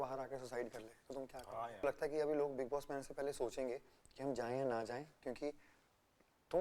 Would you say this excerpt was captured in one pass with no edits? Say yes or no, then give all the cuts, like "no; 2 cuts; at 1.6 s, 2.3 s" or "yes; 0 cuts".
no; 1 cut; at 1.8 s